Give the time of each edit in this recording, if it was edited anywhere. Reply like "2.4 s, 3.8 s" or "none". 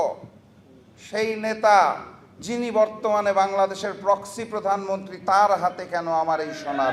none